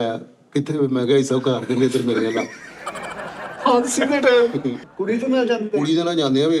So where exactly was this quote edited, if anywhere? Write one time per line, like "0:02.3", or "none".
0:04.9